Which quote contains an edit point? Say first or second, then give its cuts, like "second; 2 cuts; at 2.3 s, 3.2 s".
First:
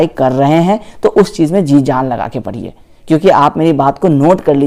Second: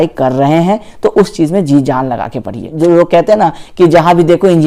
second; 1 cut; at 2.7 s